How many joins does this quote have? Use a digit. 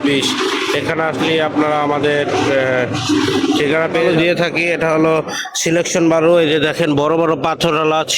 1